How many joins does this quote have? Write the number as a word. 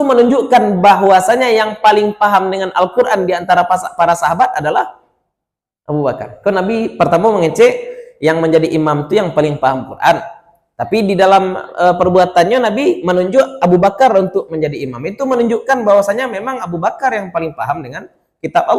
zero